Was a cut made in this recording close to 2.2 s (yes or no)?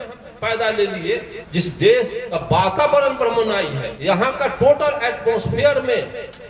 yes